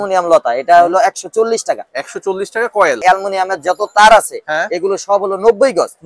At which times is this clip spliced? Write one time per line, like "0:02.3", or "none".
0:03.0